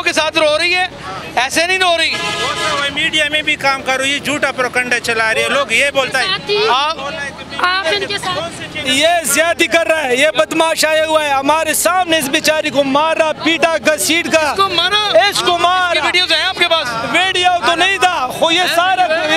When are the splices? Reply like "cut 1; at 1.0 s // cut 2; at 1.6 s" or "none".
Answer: none

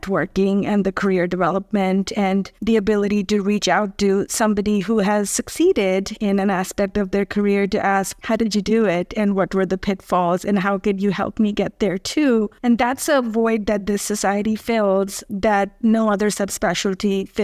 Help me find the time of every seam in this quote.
cut 1; at 2.5 s // cut 2; at 8.2 s // cut 3; at 12.5 s

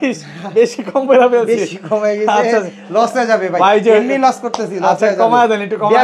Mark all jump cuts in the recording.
none

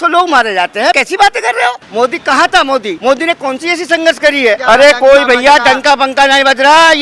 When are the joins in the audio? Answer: cut 1; at 1.0 s // cut 2; at 1.8 s // cut 3; at 2.9 s // cut 4; at 4.6 s

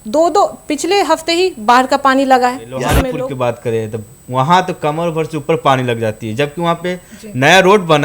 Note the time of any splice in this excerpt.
cut 1; at 3.0 s

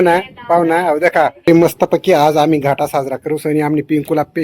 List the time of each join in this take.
cut 1; at 1.5 s

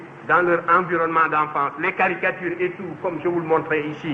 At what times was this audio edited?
none

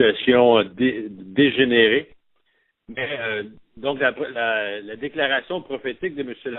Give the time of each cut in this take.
cut 1; at 0.9 s

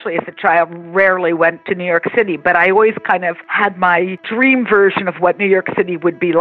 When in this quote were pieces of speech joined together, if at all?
cut 1; at 1.6 s // cut 2; at 3.5 s // cut 3; at 4.2 s

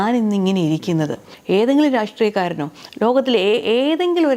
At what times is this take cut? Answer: cut 1; at 1.3 s

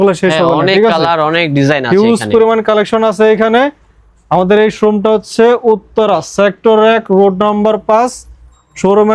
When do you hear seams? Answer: none

